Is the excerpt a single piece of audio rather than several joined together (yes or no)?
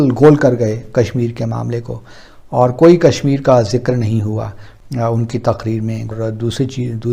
no